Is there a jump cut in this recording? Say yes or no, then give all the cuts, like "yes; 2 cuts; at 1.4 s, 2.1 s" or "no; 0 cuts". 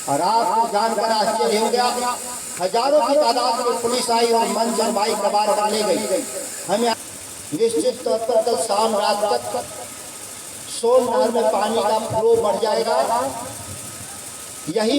yes; 1 cut; at 6.9 s